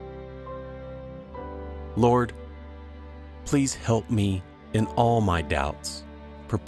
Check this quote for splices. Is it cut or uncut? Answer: cut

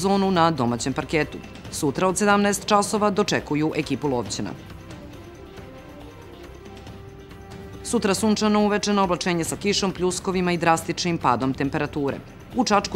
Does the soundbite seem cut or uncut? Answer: uncut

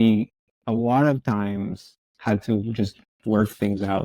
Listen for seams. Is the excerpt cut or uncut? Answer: uncut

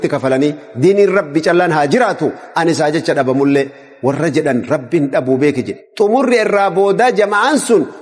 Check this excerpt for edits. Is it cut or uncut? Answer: cut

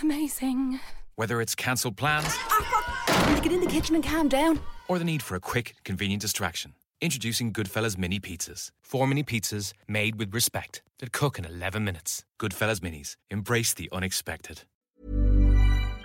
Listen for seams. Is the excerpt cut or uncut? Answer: cut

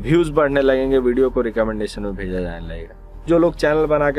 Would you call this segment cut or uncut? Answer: cut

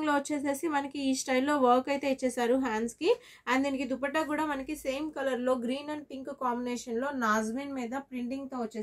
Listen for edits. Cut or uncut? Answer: uncut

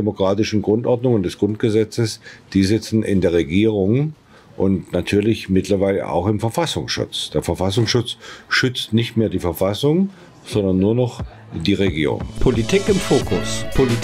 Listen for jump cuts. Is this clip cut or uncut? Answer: cut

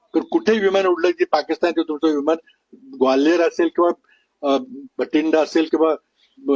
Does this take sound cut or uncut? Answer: cut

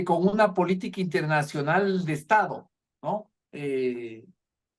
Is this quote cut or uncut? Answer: uncut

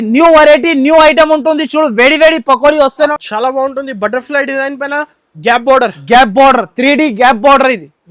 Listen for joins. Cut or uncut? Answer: cut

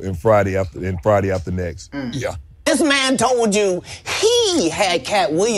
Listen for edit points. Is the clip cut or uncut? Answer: cut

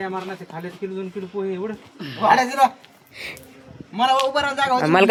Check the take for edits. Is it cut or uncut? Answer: uncut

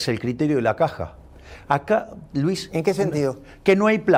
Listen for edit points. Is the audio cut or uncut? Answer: uncut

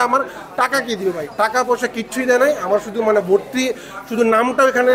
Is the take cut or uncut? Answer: uncut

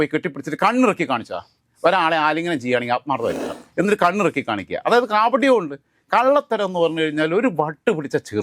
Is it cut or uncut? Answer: uncut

